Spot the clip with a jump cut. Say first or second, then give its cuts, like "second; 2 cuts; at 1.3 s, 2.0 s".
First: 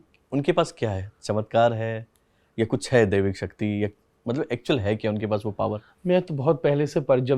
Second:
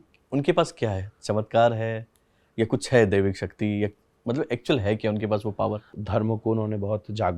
second; 1 cut; at 6.0 s